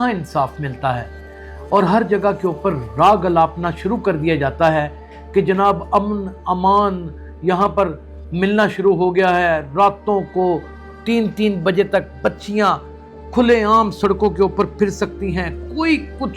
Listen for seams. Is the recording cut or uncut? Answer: uncut